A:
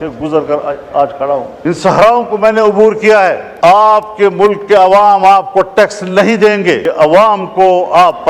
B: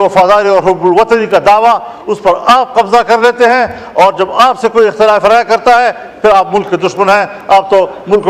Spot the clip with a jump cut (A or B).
A